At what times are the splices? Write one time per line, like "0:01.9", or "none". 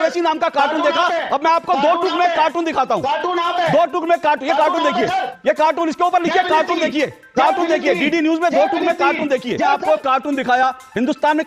0:09.7